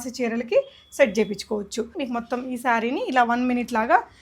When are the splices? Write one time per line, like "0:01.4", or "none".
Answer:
0:02.0